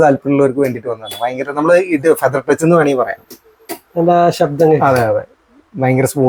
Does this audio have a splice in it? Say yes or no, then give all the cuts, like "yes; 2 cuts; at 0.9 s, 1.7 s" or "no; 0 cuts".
no; 0 cuts